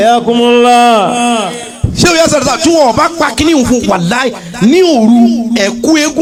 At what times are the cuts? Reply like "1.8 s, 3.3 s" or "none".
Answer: none